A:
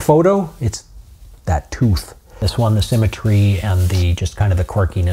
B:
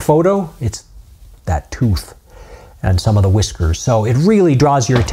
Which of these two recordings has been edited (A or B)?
A